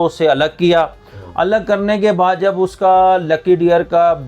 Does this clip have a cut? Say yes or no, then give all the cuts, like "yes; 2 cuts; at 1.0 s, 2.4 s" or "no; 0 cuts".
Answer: no; 0 cuts